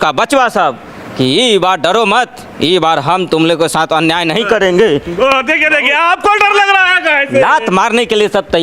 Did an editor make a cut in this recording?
no; 0 cuts

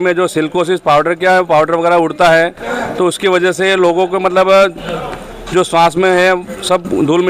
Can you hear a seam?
no; 0 cuts

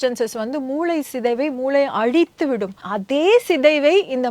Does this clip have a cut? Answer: yes; 1 cut; at 2.9 s

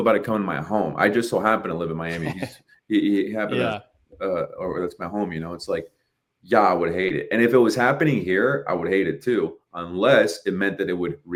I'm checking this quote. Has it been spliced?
no; 0 cuts

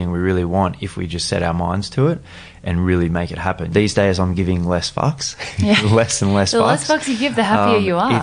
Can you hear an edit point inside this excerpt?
yes; 1 cut; at 3.7 s

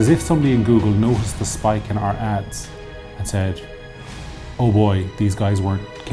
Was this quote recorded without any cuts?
yes; 0 cuts

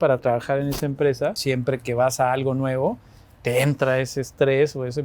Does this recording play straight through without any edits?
no; 1 cut; at 1.4 s

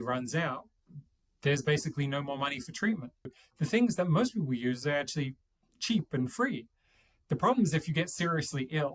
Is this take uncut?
no; 1 cut; at 3.4 s

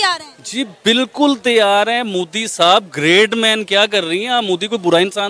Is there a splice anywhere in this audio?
no; 0 cuts

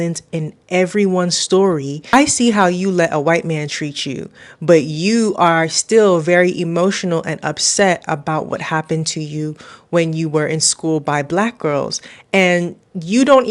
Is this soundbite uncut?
yes; 0 cuts

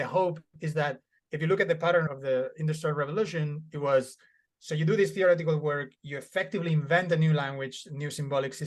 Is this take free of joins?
yes; 0 cuts

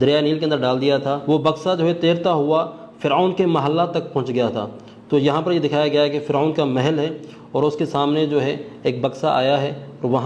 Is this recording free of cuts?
no; 1 cut; at 1.2 s

